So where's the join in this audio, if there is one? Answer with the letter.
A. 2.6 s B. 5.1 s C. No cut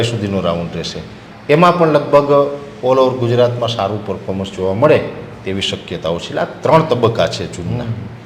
C